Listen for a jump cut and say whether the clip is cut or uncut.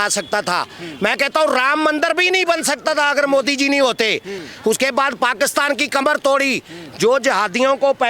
cut